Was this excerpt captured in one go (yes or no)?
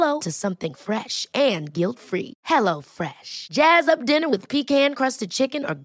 yes